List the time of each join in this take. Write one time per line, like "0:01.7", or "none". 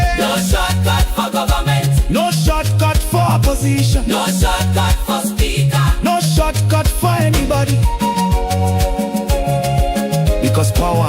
0:10.2